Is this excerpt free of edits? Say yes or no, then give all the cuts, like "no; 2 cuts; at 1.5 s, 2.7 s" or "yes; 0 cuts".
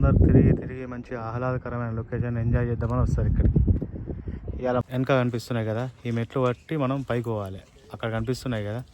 no; 1 cut; at 4.8 s